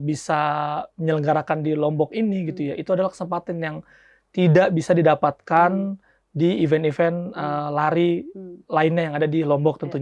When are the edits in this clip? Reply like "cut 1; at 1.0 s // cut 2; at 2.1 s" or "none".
none